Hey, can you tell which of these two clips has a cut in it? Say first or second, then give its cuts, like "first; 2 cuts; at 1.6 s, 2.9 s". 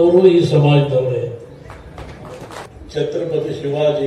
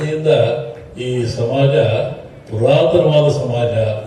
first; 1 cut; at 2.6 s